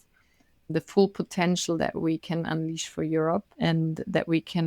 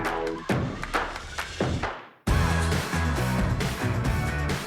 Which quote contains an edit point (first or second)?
first